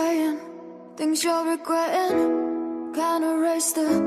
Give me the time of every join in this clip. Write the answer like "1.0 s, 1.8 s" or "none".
2.2 s